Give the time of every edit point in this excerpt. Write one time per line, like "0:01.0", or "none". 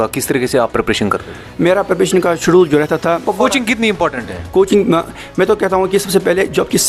0:03.2